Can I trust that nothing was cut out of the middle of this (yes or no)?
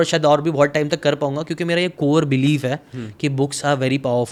yes